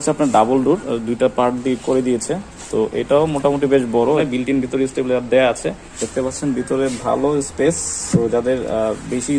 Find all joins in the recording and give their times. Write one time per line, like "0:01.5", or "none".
0:04.2
0:05.9
0:07.9